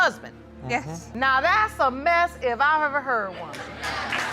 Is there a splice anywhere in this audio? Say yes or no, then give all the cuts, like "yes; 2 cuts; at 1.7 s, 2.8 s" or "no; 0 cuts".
yes; 1 cut; at 1.1 s